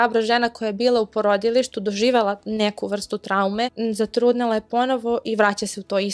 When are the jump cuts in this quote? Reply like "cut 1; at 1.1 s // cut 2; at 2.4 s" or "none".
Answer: cut 1; at 3.8 s